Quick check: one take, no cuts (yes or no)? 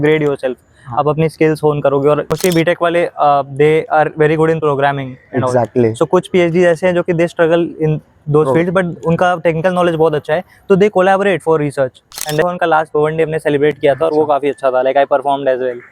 no